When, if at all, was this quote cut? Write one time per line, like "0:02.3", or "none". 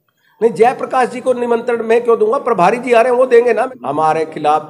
0:03.7